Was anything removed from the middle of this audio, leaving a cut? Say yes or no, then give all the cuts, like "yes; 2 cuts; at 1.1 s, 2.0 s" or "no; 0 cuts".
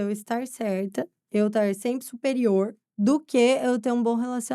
yes; 2 cuts; at 1.2 s, 2.8 s